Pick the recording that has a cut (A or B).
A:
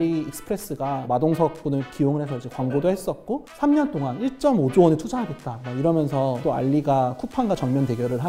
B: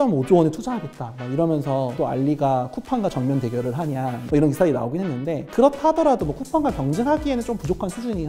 A